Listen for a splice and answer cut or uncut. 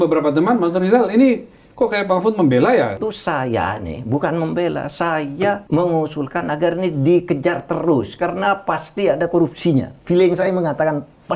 cut